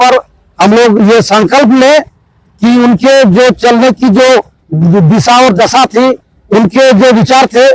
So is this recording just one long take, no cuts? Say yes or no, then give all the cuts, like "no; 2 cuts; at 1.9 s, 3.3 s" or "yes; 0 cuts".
yes; 0 cuts